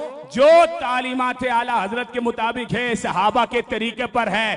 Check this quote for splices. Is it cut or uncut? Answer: uncut